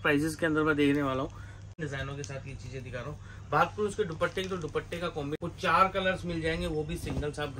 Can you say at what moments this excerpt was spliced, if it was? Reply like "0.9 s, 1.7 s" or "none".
1.7 s, 5.4 s

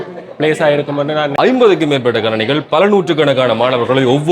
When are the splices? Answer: 1.3 s

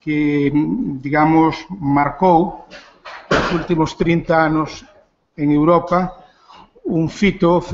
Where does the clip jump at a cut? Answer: none

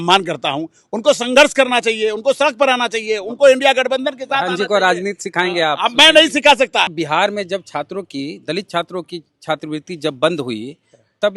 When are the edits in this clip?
6.9 s

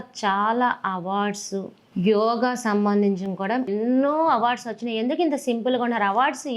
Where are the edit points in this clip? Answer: 1.8 s, 3.7 s

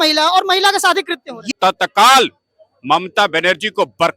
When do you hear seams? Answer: 1.5 s

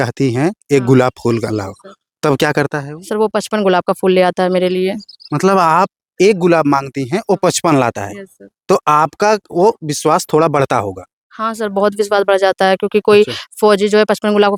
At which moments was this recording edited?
none

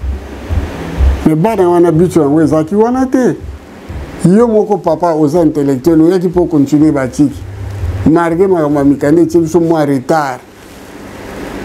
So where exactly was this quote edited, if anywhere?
none

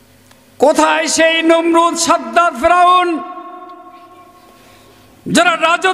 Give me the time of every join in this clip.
none

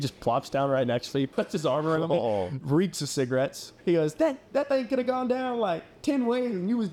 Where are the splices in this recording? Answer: 1.3 s, 2.6 s, 3.7 s

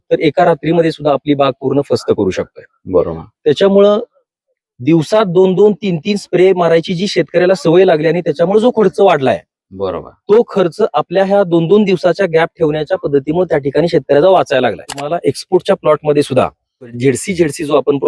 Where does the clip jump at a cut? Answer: 15.1 s, 17.0 s

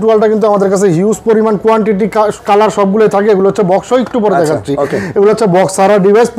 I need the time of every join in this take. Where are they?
none

